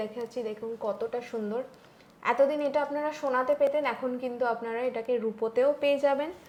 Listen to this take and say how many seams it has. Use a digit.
0